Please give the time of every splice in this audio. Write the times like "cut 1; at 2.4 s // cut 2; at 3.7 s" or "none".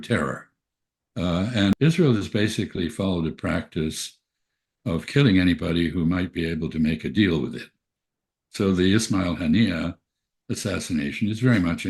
cut 1; at 1.7 s